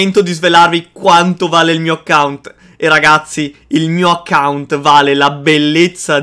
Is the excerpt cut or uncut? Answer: uncut